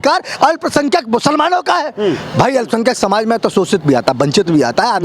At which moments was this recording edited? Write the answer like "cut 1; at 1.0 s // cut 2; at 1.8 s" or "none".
none